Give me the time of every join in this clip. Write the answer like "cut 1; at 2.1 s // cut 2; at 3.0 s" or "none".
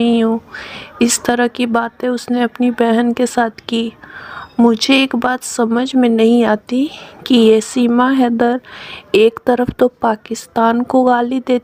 none